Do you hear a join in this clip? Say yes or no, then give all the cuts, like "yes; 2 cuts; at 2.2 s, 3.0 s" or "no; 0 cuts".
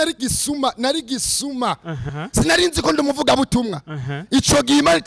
yes; 1 cut; at 2.0 s